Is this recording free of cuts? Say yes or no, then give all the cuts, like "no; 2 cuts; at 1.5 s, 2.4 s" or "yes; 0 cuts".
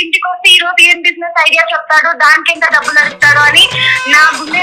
yes; 0 cuts